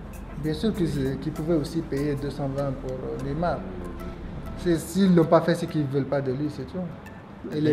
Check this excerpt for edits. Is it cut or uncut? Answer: uncut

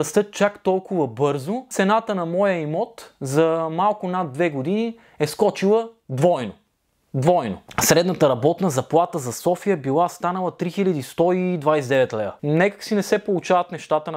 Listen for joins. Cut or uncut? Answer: cut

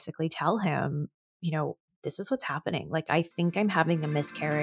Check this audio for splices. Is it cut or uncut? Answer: cut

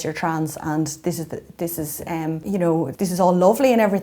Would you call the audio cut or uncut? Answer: cut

